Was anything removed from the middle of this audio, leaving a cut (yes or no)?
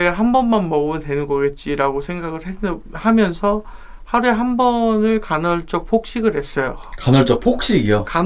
no